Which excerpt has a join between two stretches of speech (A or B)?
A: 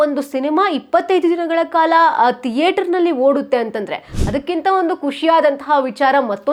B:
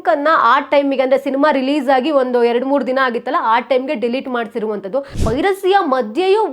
B